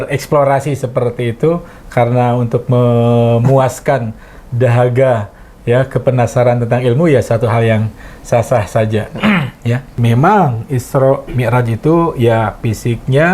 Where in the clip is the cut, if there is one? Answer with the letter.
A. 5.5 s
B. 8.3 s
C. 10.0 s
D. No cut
C